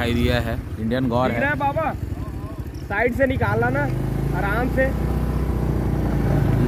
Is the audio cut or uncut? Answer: uncut